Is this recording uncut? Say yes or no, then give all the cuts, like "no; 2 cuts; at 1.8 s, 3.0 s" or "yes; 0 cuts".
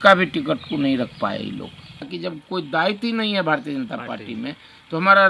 no; 1 cut; at 2.1 s